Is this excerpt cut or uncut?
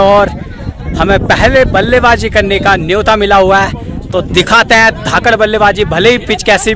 uncut